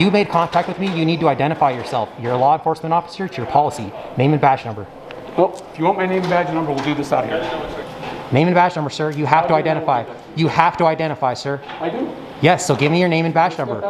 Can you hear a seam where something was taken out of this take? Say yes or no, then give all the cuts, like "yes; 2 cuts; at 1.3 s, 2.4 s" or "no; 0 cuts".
yes; 1 cut; at 7.8 s